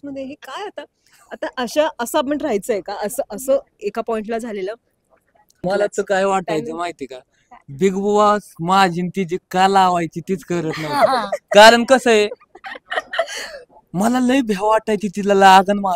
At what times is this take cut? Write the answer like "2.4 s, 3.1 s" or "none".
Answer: 5.6 s